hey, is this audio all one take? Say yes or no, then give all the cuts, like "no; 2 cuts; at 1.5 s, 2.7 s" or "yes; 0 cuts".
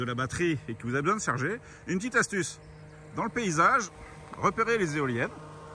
yes; 0 cuts